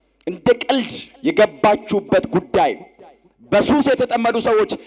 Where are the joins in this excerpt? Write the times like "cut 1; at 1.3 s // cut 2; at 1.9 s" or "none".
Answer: none